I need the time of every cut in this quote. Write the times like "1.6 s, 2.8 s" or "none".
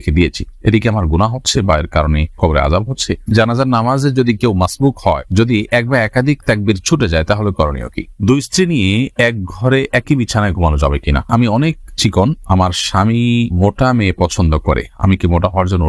3.3 s, 8.0 s, 11.3 s